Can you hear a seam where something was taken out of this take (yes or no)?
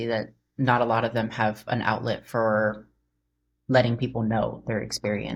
no